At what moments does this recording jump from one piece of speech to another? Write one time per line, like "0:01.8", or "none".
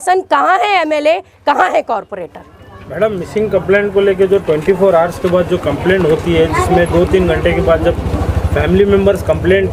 none